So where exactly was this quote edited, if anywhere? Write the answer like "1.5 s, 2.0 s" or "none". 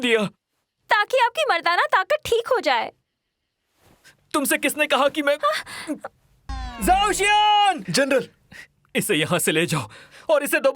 6.4 s, 7.8 s